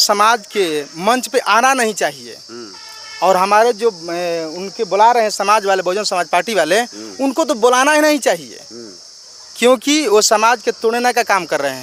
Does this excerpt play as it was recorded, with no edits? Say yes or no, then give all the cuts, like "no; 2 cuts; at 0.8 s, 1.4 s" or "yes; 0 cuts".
yes; 0 cuts